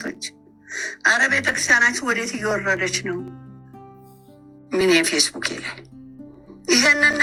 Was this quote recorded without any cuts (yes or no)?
yes